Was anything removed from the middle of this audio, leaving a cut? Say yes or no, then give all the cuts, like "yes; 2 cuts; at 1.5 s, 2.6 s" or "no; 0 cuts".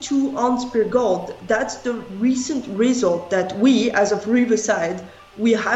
no; 0 cuts